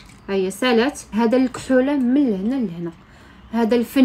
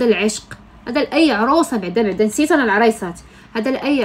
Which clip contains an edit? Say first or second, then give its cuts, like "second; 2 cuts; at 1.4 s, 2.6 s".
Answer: first; 1 cut; at 1.0 s